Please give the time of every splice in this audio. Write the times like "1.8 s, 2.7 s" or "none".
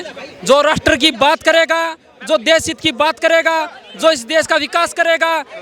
none